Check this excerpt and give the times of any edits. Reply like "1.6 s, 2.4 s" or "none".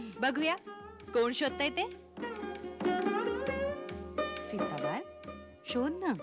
2.6 s